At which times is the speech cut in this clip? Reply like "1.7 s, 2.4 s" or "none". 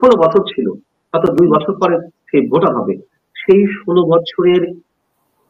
none